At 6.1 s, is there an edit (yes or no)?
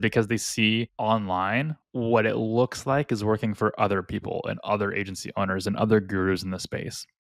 no